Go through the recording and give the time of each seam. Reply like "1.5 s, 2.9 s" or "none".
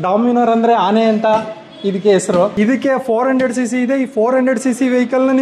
2.5 s